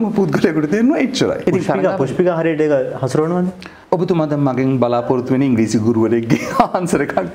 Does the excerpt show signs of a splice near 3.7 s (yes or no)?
yes